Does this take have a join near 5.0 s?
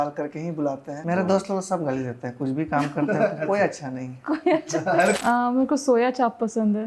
yes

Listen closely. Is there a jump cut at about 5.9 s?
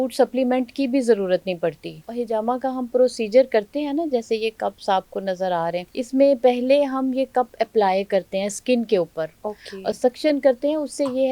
yes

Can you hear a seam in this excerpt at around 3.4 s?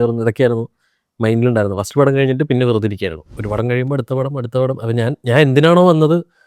yes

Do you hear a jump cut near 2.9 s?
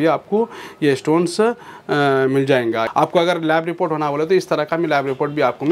yes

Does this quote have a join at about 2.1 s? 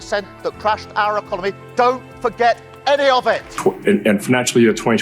no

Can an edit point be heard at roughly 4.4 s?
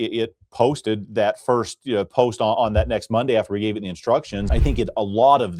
yes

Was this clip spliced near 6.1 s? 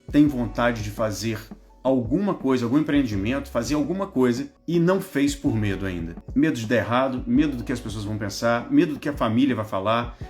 yes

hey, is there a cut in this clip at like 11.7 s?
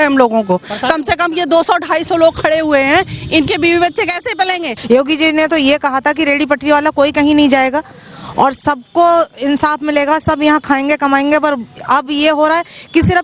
no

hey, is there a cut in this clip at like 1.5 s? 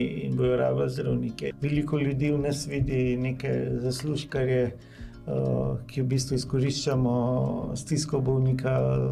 yes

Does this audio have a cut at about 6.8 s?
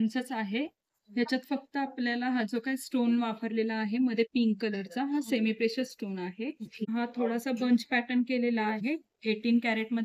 yes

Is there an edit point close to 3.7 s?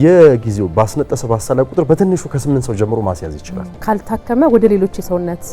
yes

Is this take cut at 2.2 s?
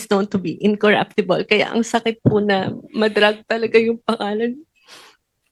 no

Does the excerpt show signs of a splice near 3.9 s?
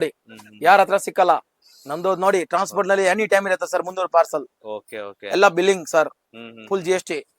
no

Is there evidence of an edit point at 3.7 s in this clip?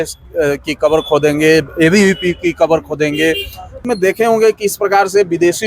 yes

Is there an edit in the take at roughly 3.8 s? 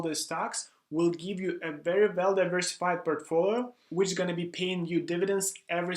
yes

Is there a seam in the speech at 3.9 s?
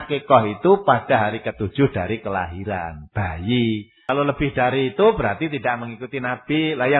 yes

